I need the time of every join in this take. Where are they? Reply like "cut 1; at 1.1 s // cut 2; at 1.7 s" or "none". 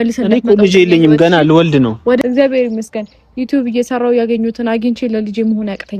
cut 1; at 2.2 s